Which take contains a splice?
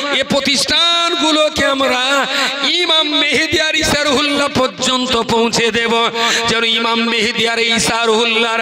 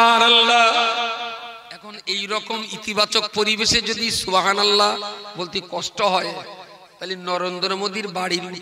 second; 1 cut; at 1.9 s

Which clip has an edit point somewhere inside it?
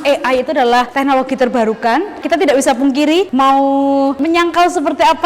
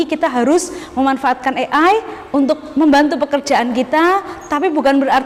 first; 3 cuts; at 0.9 s, 2.2 s, 4.2 s

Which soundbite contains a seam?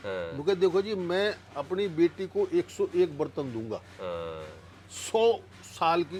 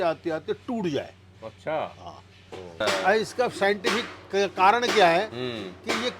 second; 1 cut; at 2.8 s

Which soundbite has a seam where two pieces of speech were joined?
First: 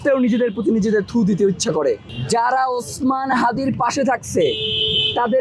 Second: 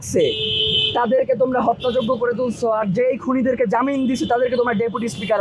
first; 1 cut; at 2.1 s

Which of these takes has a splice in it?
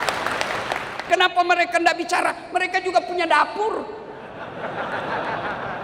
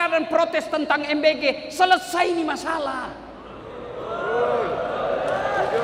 first; 1 cut; at 0.9 s

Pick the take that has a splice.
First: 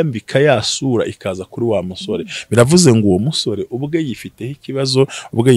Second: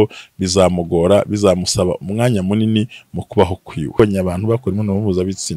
second; 1 cut; at 4.0 s

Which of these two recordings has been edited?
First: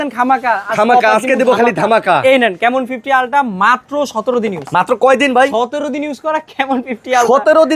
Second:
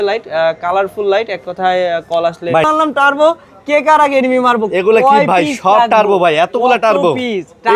second; 1 cut; at 2.7 s

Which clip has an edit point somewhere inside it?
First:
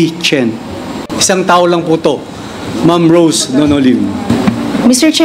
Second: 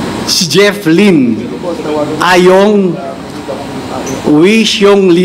first; 2 cuts; at 1.1 s, 4.3 s

